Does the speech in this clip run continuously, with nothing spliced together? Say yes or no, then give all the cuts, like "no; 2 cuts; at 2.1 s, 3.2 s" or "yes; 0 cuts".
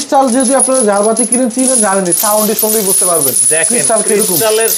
yes; 0 cuts